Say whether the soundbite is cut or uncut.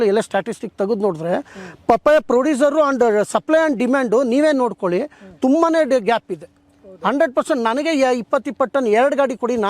uncut